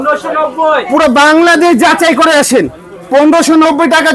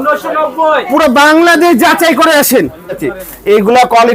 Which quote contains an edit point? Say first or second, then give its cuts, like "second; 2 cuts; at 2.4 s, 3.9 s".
second; 1 cut; at 3.0 s